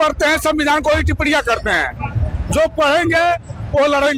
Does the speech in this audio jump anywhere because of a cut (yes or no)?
no